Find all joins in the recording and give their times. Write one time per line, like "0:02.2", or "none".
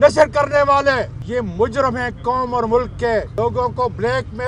0:01.2
0:03.3